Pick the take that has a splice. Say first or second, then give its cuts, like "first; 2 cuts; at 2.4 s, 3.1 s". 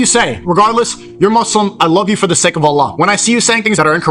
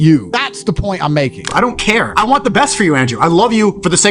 second; 1 cut; at 1.5 s